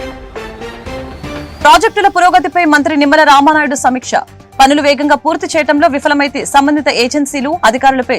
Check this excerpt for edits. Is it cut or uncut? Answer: cut